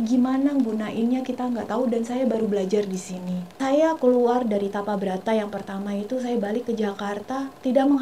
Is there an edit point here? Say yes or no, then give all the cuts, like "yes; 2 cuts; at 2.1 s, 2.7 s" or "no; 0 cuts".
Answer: yes; 1 cut; at 3.5 s